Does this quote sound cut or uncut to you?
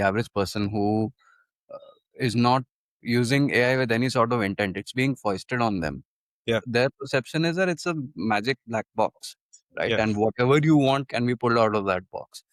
uncut